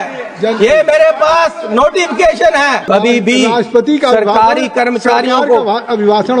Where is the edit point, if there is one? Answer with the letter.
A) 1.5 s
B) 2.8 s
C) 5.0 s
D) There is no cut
B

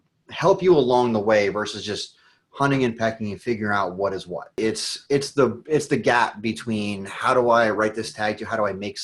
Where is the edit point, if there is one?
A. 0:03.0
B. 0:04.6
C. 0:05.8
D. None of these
B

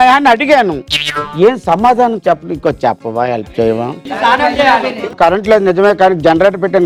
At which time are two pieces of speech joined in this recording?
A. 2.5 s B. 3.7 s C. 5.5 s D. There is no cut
D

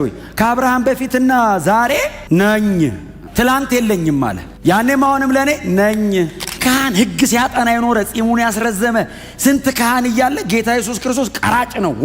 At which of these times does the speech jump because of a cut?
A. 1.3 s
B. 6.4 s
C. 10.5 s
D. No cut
B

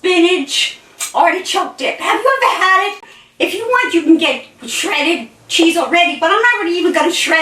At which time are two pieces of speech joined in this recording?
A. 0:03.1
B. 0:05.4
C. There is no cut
A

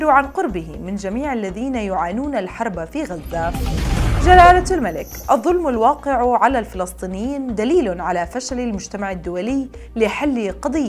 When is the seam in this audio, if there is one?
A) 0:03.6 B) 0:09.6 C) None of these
A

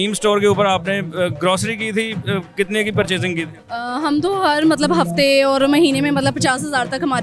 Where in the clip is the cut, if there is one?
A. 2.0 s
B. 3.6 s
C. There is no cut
B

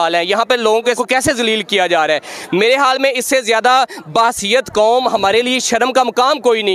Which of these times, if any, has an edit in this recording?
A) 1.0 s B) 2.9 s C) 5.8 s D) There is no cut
A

